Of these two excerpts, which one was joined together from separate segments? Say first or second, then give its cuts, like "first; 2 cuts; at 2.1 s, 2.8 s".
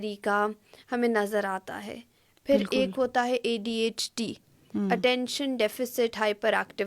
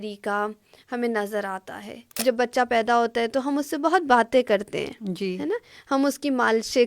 second; 1 cut; at 2.2 s